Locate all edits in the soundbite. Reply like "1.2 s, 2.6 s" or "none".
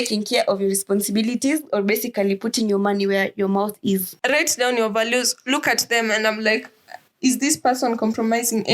4.1 s